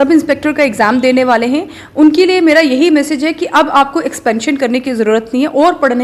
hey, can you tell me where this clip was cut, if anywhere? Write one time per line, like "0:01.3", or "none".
none